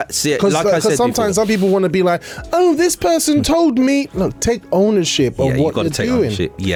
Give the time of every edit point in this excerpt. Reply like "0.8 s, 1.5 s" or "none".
none